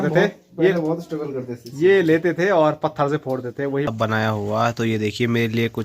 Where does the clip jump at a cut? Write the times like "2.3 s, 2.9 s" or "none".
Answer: 3.9 s